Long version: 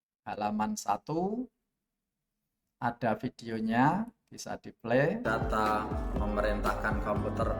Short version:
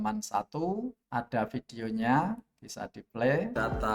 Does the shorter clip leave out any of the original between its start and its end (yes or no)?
yes